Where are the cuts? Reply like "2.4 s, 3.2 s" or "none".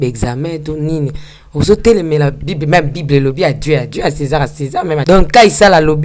5.0 s